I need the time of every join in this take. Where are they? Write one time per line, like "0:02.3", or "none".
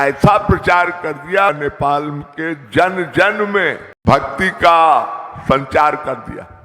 0:01.5
0:03.9